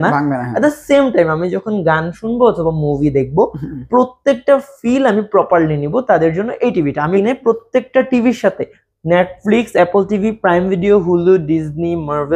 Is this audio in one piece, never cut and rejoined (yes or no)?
no